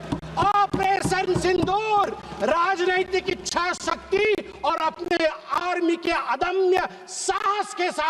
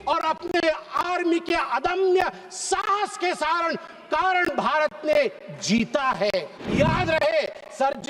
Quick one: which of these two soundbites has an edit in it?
second; 1 cut; at 6.6 s

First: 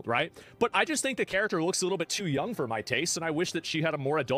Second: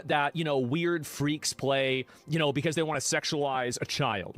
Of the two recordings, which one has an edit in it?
second; 1 cut; at 2.3 s

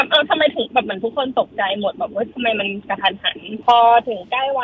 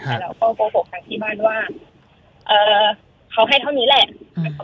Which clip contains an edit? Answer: first; 1 cut; at 3.6 s

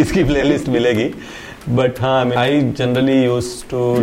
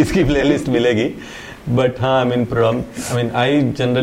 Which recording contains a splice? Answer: first; 1 cut; at 2.3 s

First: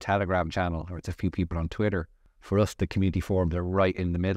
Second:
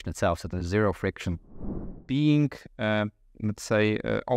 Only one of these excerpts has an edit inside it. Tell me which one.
second; 1 cut; at 1.9 s

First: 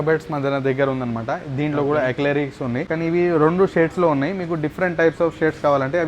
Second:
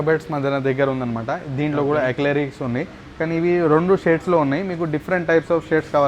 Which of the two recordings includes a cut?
first; 1 cut; at 2.9 s

